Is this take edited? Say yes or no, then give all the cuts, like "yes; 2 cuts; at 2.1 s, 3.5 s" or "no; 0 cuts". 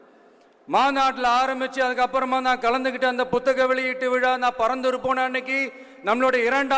no; 0 cuts